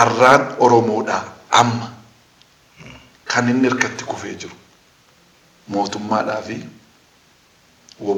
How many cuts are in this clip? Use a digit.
0